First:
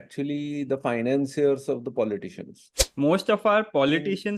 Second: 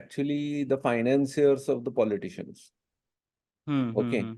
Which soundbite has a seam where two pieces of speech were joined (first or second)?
first